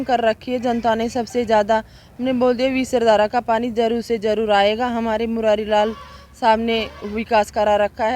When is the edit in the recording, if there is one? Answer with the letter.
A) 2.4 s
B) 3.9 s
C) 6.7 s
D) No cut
D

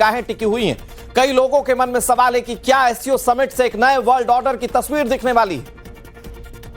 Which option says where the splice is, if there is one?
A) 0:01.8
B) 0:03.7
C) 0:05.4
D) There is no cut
B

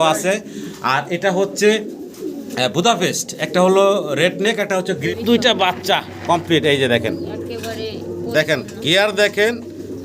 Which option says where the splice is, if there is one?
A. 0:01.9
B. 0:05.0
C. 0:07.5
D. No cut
B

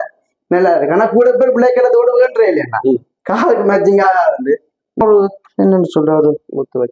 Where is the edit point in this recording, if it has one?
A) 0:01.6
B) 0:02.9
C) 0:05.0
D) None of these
C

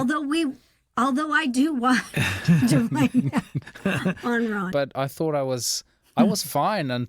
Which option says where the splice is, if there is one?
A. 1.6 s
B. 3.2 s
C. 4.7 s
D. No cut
C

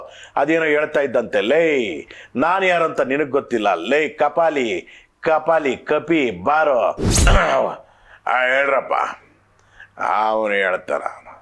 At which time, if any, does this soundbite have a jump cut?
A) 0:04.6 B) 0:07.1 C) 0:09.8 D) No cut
B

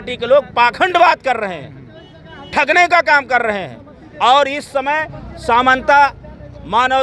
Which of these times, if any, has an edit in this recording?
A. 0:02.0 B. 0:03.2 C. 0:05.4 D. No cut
D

